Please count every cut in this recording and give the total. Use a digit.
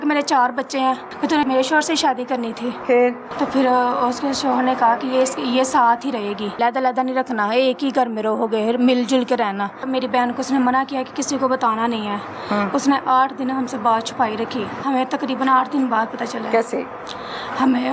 5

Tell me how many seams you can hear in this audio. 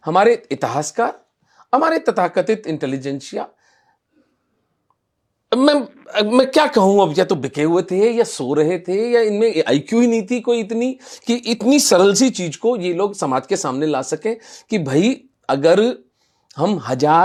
0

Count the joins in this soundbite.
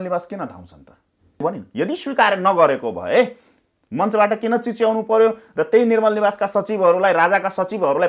1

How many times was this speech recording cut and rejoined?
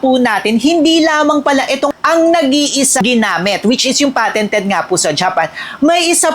2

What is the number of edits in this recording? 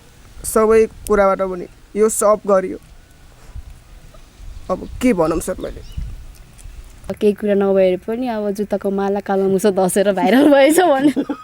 1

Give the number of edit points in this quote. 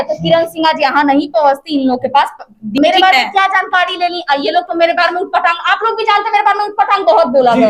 1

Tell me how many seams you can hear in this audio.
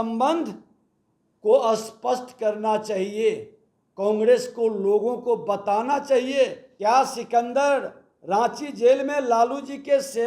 1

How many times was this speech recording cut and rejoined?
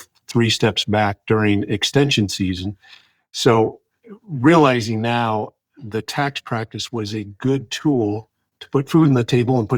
1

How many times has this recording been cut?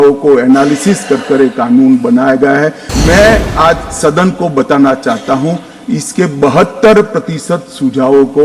1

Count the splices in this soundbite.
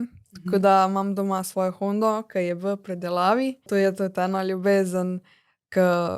1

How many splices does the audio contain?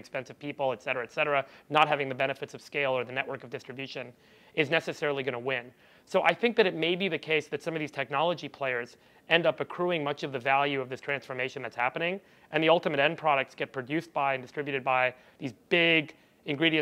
0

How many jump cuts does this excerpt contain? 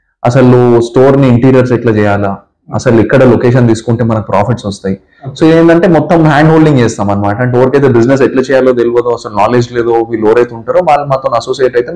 0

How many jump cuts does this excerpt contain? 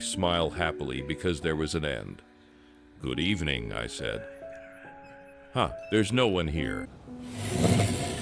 1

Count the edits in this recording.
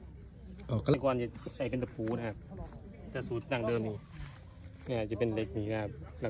1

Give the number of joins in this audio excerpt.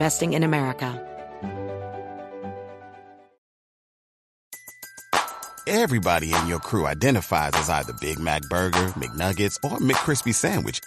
1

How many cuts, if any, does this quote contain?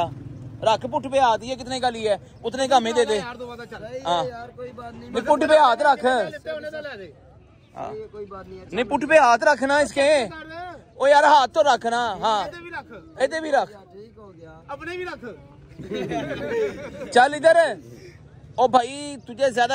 0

